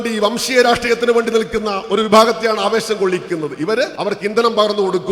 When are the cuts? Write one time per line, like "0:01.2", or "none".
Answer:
0:03.9